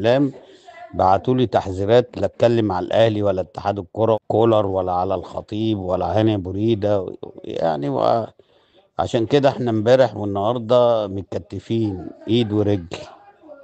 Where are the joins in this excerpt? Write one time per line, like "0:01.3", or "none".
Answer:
0:04.2